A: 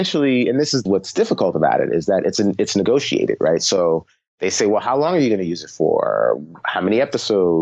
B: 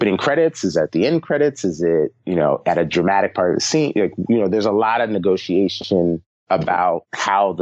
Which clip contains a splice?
A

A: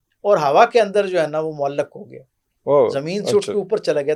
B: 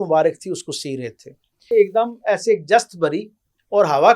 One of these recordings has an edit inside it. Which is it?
B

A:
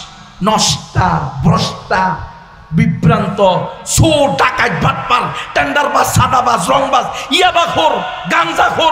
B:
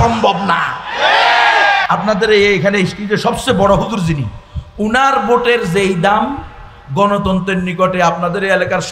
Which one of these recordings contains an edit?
B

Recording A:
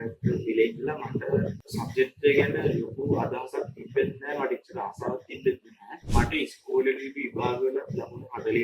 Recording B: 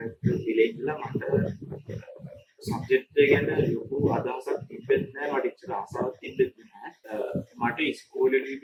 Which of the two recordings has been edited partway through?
A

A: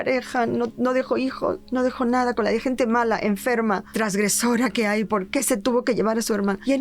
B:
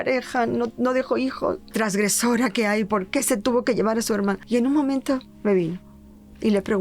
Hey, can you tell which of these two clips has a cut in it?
B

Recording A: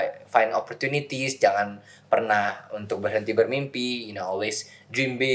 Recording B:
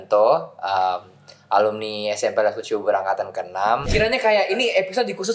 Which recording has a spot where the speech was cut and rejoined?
B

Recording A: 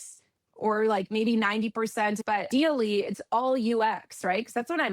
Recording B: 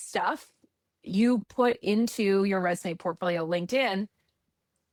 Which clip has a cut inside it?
A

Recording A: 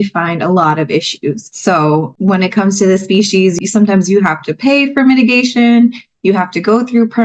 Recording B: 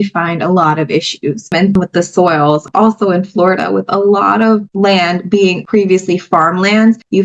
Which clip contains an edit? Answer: B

